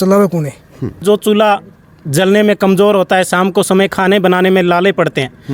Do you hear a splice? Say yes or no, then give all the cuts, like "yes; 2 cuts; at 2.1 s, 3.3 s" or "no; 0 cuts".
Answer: yes; 1 cut; at 1.0 s